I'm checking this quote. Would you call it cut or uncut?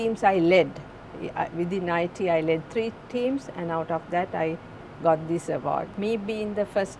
cut